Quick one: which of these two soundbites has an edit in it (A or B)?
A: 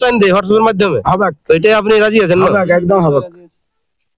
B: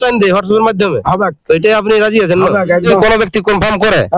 B